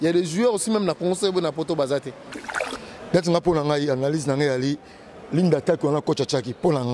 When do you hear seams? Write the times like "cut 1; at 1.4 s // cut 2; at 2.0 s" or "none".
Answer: cut 1; at 2.6 s